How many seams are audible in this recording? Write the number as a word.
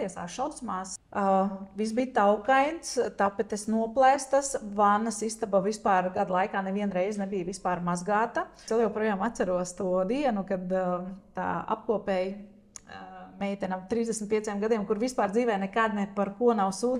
two